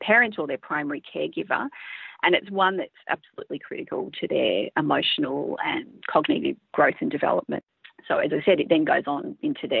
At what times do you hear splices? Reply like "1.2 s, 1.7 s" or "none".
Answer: 7.6 s